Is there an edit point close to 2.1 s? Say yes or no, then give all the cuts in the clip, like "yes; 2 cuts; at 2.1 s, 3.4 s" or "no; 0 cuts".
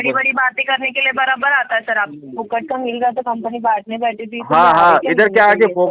yes; 1 cut; at 2.1 s